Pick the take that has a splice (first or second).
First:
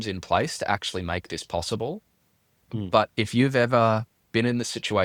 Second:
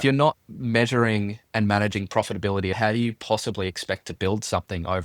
second